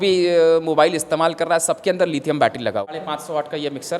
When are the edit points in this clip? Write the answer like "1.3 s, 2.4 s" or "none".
2.9 s